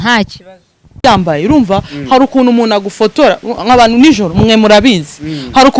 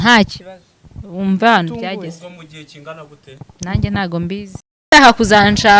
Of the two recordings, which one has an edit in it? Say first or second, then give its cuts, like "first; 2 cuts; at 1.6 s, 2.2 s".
first; 1 cut; at 1.0 s